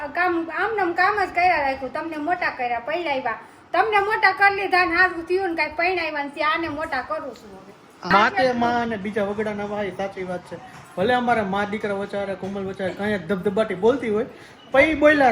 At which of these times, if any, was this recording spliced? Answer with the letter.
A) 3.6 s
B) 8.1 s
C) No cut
B